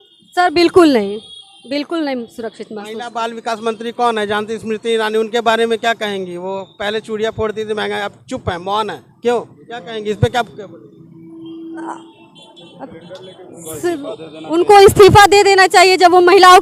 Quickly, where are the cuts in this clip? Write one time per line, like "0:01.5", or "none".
none